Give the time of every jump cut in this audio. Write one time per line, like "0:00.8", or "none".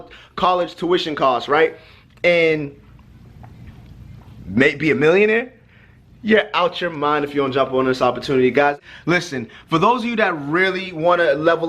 0:08.7